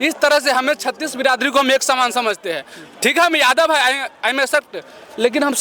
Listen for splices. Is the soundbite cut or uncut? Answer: uncut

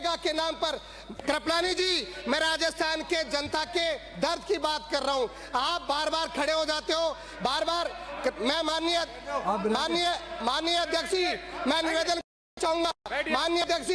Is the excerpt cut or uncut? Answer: uncut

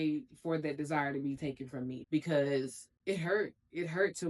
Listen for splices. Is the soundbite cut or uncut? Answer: uncut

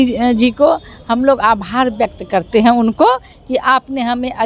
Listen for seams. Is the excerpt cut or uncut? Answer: uncut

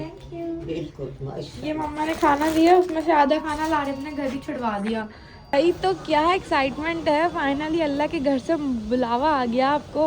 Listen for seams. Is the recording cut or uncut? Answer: cut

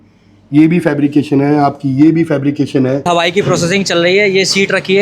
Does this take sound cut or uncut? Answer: cut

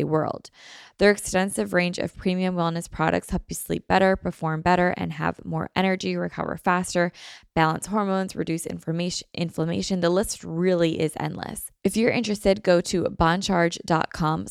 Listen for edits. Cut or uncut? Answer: cut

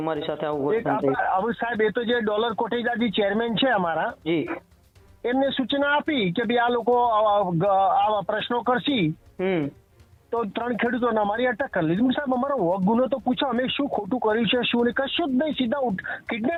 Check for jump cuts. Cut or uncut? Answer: uncut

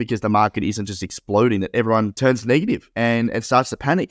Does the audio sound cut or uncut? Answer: cut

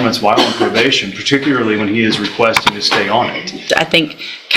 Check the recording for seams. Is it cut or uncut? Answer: cut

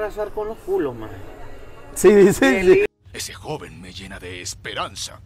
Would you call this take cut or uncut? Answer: uncut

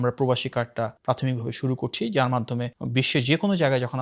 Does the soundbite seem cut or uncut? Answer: uncut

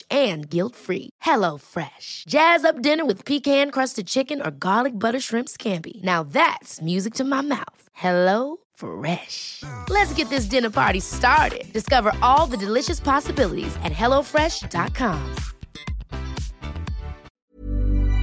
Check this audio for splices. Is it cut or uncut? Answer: cut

